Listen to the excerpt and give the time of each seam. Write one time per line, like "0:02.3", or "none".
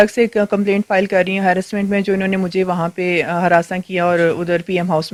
none